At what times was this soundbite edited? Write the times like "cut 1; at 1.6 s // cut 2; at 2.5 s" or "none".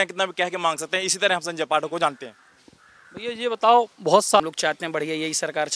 cut 1; at 4.4 s